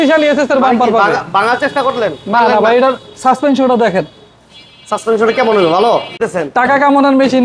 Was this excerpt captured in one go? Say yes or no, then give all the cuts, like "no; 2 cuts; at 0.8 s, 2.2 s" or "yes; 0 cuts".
no; 1 cut; at 6.3 s